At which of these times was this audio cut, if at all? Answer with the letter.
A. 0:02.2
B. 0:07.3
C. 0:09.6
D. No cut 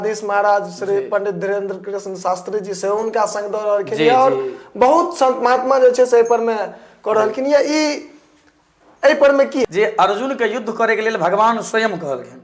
C